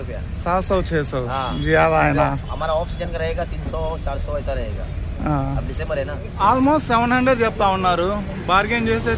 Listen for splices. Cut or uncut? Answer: uncut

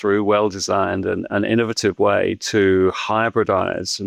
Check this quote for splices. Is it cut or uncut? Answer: uncut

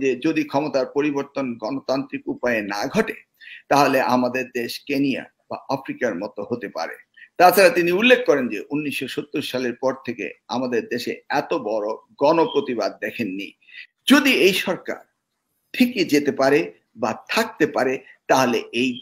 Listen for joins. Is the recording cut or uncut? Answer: cut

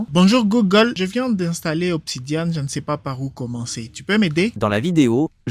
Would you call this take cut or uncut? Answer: cut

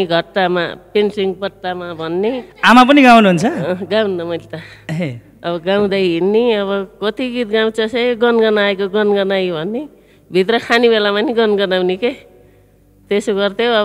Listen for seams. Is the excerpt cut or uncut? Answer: uncut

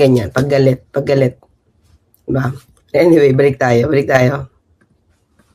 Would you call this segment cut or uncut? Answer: uncut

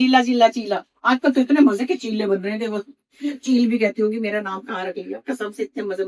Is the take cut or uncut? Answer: uncut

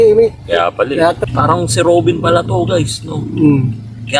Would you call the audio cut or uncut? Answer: cut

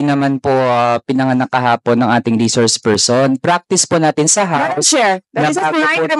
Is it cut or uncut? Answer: uncut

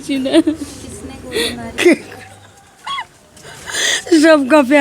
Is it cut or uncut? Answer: cut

